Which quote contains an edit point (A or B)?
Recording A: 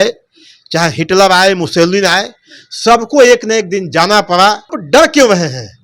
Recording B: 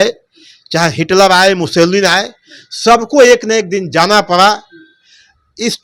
A